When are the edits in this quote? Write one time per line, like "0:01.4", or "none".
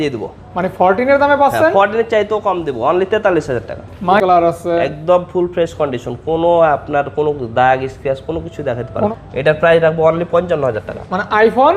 0:04.2
0:09.1